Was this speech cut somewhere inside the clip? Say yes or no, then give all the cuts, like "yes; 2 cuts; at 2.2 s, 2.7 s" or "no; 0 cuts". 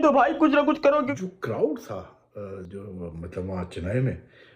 yes; 1 cut; at 1.1 s